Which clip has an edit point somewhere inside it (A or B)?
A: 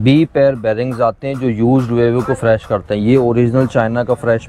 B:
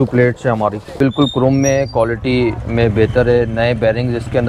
B